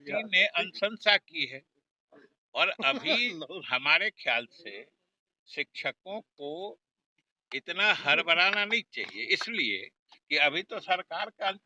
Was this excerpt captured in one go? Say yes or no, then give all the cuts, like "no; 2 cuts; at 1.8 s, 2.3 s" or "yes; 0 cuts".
yes; 0 cuts